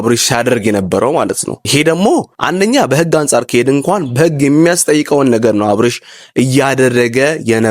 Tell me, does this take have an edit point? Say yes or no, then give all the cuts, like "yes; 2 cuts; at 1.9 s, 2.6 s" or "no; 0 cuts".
yes; 2 cuts; at 1.5 s, 2.4 s